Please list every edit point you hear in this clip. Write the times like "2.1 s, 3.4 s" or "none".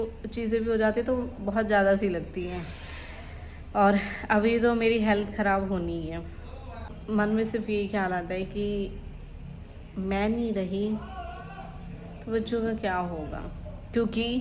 7.0 s